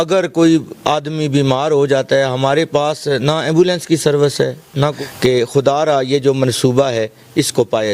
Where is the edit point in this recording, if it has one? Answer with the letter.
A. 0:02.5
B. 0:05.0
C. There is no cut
B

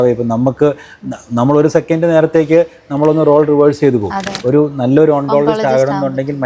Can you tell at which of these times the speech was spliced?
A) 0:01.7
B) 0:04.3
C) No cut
B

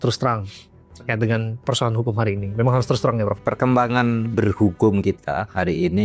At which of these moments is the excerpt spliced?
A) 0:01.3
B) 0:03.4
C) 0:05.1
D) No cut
D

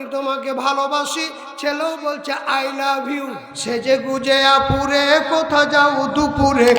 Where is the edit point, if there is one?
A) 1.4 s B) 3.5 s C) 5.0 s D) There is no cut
B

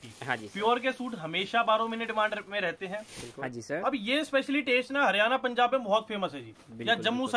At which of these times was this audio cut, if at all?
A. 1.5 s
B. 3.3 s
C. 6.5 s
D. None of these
B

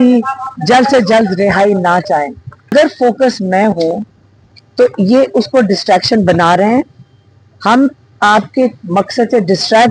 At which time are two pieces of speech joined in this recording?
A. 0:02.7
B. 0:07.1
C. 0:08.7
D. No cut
A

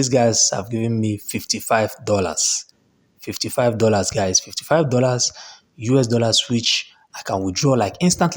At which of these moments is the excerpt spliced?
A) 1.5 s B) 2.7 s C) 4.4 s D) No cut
D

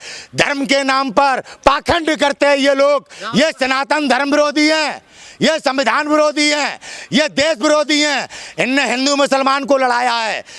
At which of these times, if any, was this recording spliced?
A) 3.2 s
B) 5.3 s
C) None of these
A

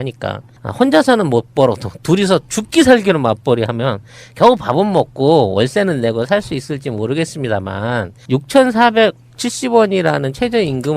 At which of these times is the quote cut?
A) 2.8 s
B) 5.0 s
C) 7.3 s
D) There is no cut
B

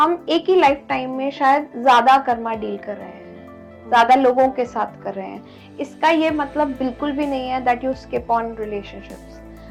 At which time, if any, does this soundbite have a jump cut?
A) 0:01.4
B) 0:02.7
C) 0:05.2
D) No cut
D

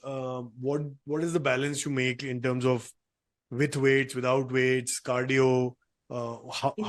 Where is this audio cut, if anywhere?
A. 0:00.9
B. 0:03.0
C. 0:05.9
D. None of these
D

